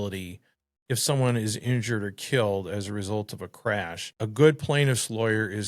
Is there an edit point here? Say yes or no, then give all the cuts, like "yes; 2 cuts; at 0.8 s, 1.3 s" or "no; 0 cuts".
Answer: yes; 1 cut; at 4.0 s